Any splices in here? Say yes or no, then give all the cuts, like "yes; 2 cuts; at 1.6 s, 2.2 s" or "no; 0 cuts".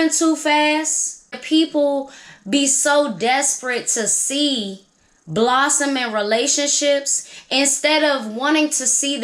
yes; 1 cut; at 1.4 s